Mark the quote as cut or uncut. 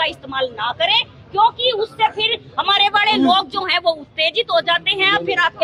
uncut